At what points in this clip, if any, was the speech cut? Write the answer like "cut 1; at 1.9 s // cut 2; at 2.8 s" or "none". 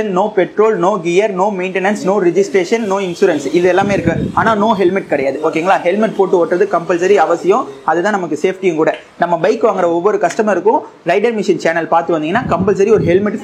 none